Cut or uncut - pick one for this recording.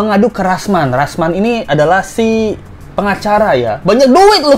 uncut